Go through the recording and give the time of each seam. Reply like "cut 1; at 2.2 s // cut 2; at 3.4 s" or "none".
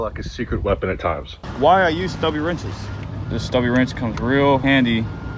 cut 1; at 1.3 s // cut 2; at 2.9 s